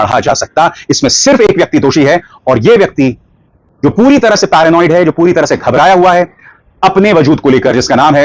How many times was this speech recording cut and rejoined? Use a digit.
0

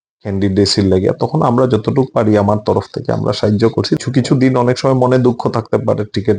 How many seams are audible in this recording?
1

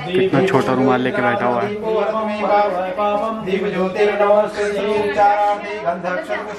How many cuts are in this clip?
0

